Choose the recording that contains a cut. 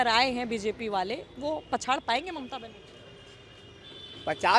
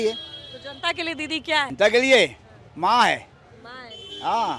second; 1 cut; at 1.7 s

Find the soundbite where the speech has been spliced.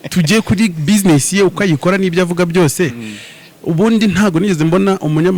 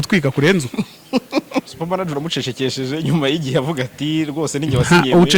second; 1 cut; at 1.7 s

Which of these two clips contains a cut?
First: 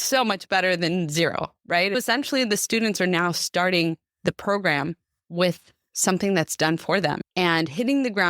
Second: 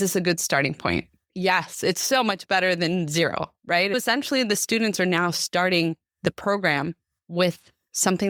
first; 1 cut; at 7.2 s

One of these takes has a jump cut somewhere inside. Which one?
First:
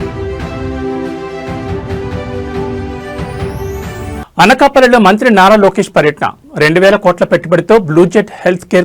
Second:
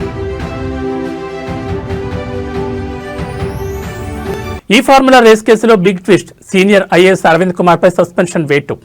second; 1 cut; at 4.2 s

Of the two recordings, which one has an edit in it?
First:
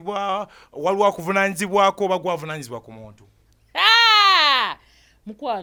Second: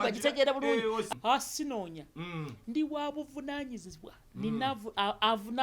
second; 1 cut; at 1.0 s

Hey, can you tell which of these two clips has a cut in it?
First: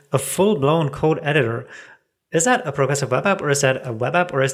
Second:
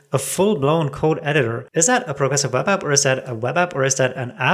second; 1 cut; at 1.6 s

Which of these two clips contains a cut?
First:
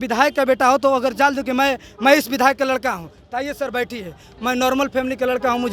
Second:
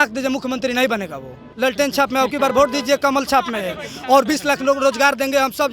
second; 1 cut; at 1.4 s

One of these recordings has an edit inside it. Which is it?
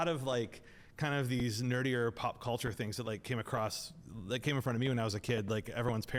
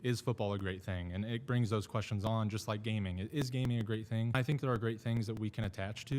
second; 1 cut; at 4.3 s

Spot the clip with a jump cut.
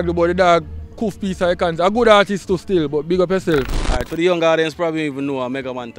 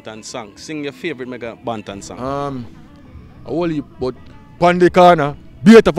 first; 1 cut; at 3.7 s

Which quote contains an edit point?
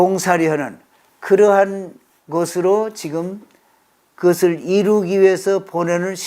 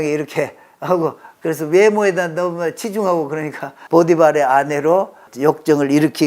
second; 2 cuts; at 3.8 s, 5.2 s

